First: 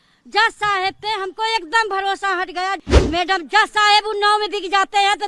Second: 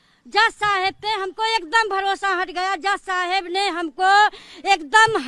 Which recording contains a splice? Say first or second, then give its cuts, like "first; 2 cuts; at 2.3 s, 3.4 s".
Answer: first; 1 cut; at 2.8 s